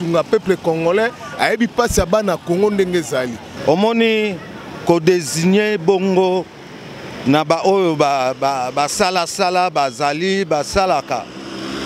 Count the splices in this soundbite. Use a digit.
1